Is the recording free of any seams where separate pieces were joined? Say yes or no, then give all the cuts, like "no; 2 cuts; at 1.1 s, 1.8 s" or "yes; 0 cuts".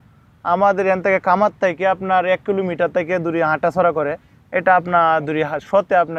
yes; 0 cuts